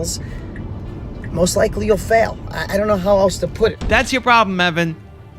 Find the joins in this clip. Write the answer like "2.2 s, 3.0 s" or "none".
3.8 s